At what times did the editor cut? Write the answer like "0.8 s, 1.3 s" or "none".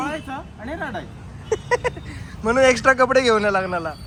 none